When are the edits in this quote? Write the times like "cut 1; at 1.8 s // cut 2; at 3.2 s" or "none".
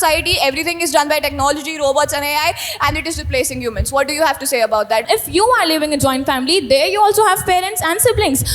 cut 1; at 5.0 s